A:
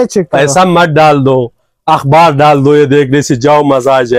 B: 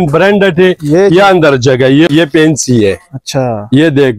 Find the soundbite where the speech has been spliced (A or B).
B